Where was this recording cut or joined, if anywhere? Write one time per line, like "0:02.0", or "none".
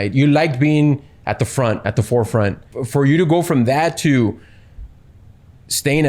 0:02.7